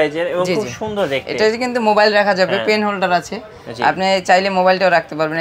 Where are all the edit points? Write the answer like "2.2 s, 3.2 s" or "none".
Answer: none